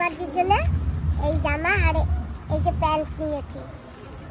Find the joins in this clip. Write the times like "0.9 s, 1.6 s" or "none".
none